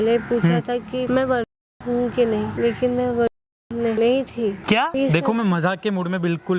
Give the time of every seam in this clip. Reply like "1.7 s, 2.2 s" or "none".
1.1 s, 2.5 s, 4.0 s, 4.8 s